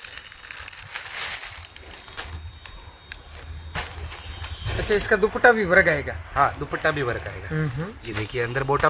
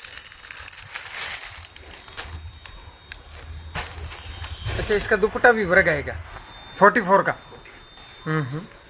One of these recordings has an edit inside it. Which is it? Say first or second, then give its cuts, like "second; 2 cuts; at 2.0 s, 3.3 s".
second; 1 cut; at 6.2 s